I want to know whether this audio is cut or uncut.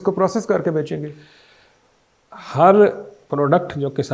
uncut